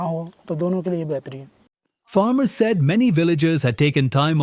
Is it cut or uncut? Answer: uncut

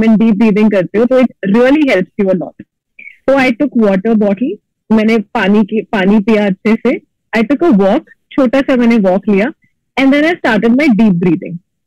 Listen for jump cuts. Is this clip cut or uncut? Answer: uncut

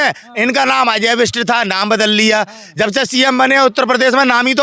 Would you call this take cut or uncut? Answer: uncut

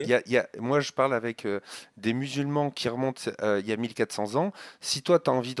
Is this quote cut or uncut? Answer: uncut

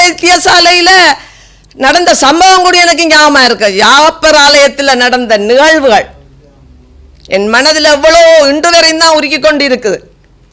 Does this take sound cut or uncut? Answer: uncut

